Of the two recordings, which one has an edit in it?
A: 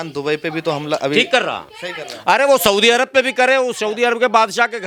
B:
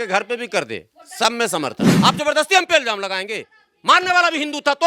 B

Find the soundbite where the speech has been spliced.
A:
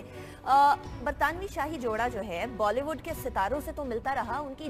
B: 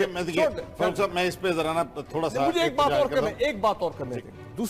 B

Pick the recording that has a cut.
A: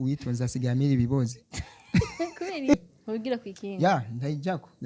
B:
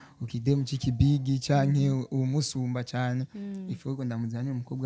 A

